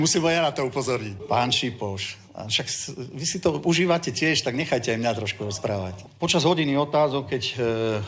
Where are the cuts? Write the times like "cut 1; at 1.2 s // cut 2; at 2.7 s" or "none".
cut 1; at 1.1 s // cut 2; at 6.0 s

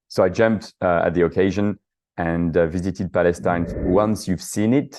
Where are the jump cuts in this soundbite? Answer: cut 1; at 3.7 s

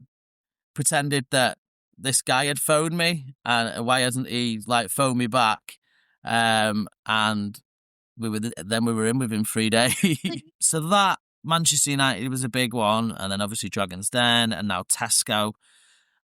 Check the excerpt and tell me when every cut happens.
cut 1; at 10.4 s

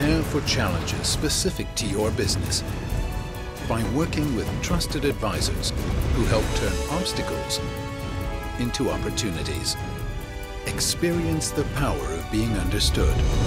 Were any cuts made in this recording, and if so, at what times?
none

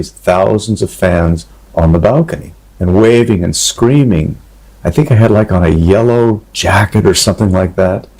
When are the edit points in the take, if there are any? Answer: none

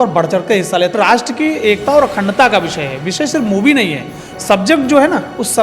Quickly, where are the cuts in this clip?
cut 1; at 1.0 s

